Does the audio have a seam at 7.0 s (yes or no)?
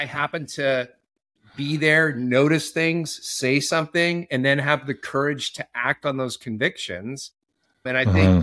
no